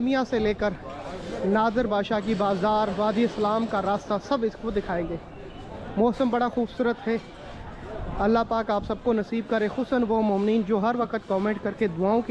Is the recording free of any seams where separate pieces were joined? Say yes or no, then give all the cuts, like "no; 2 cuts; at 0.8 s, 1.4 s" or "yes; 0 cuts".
yes; 0 cuts